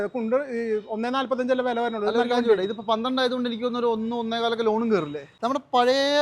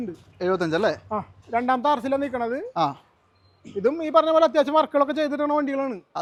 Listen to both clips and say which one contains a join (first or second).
first